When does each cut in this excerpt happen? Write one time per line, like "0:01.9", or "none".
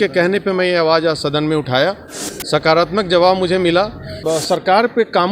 0:04.1